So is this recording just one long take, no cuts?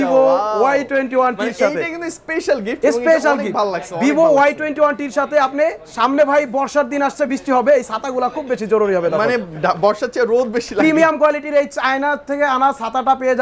yes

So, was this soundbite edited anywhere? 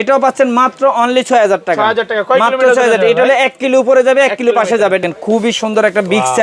yes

